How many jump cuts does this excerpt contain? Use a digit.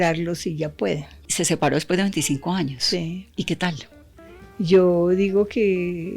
1